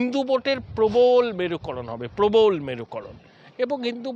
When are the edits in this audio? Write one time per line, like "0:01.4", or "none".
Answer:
none